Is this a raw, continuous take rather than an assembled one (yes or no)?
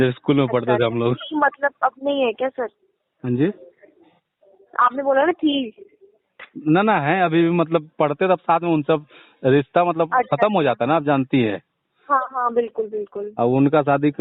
yes